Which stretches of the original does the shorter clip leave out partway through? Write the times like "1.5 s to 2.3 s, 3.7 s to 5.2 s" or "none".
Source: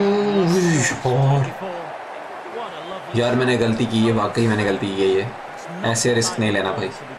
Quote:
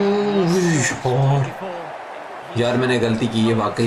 2.4 s to 3.0 s